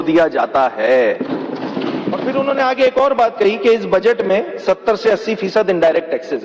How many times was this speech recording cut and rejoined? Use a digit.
1